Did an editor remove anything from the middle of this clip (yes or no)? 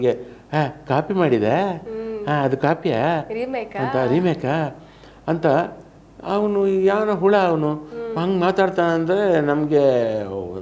no